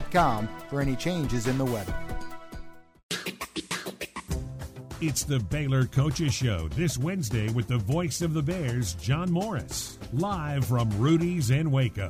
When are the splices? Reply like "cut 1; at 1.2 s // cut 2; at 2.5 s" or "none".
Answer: cut 1; at 2.7 s